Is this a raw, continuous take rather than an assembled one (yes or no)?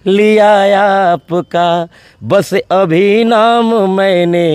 yes